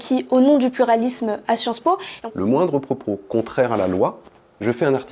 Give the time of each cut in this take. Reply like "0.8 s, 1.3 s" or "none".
2.1 s